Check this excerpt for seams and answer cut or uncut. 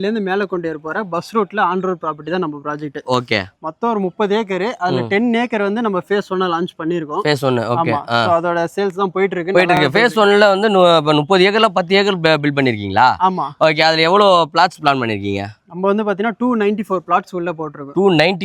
uncut